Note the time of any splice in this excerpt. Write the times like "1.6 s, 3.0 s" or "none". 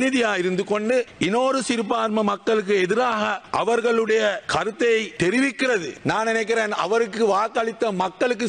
1.1 s, 3.4 s, 4.4 s, 5.5 s